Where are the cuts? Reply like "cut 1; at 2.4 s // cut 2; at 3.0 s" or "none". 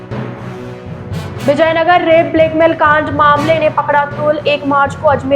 cut 1; at 1.4 s